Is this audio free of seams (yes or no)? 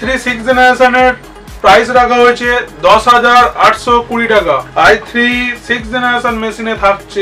yes